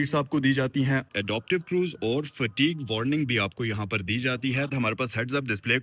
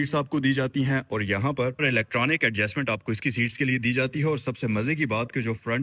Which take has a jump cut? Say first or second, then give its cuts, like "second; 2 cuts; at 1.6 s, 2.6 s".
first; 2 cuts; at 1.1 s, 4.7 s